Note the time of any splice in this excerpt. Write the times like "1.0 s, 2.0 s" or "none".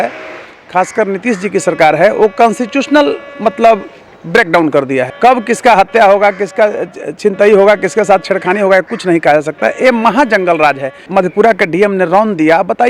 5.1 s, 11.0 s